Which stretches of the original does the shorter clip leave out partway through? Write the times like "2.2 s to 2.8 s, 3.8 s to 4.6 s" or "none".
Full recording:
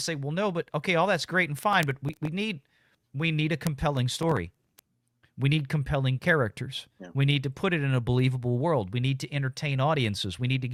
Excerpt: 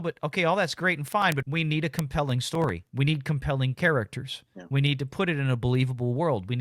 2.0 s to 3.1 s, 4.5 s to 5.3 s